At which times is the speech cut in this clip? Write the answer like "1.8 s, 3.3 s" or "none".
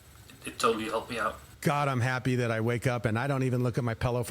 1.5 s